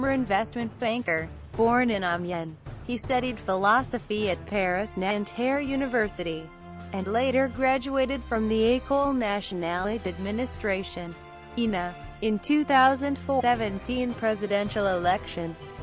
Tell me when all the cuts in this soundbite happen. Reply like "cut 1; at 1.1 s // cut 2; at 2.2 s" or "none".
none